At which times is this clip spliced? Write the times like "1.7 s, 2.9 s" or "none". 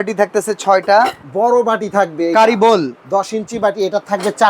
1.2 s